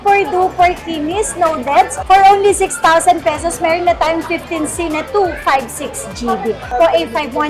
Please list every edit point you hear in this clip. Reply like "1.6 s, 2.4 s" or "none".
2.0 s, 6.7 s